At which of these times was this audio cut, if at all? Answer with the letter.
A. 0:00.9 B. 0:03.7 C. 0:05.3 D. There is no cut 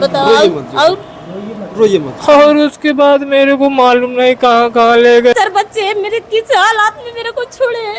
C